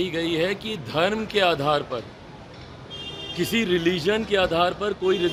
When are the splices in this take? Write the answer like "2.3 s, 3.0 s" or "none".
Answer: none